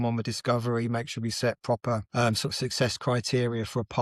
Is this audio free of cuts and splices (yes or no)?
no